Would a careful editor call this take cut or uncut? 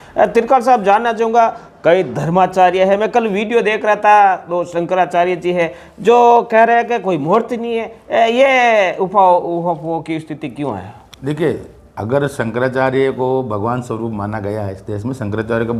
uncut